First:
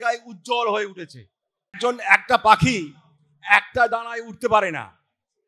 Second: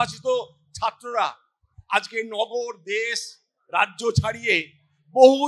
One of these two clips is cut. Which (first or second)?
first